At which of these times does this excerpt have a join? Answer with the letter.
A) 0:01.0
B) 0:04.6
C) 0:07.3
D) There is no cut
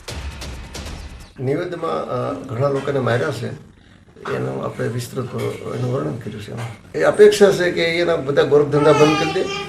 A